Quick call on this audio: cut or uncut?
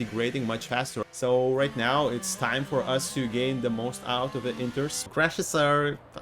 cut